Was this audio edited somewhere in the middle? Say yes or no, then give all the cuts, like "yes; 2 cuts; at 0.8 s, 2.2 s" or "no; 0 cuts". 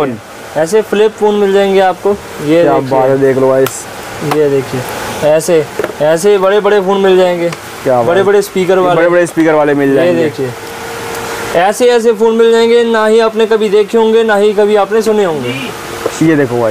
no; 0 cuts